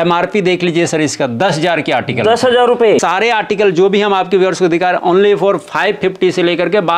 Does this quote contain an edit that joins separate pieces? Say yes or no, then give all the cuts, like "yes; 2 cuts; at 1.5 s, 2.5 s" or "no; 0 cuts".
yes; 1 cut; at 3.0 s